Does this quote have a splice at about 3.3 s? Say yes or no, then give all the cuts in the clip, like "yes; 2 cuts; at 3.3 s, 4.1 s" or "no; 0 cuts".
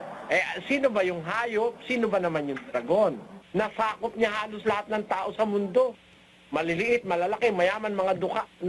yes; 1 cut; at 3.3 s